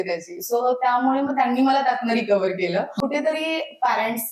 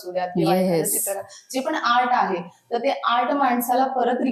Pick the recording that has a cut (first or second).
first